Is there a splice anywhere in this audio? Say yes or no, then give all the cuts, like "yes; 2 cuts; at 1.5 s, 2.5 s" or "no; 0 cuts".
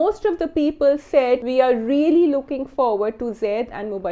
yes; 1 cut; at 1.5 s